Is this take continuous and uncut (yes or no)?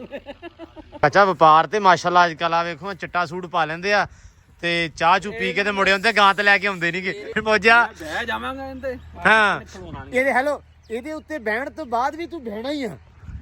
no